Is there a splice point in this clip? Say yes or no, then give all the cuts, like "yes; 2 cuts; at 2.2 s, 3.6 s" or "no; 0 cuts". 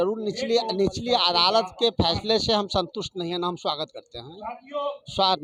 no; 0 cuts